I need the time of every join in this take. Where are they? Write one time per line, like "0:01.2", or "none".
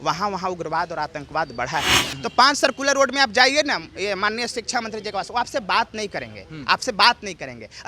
0:02.0